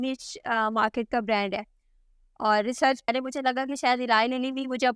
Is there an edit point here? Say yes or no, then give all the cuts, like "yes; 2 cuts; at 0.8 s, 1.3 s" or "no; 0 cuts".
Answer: yes; 1 cut; at 3.1 s